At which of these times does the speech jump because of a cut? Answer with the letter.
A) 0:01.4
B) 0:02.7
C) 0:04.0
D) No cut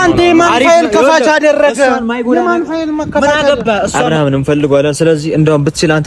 C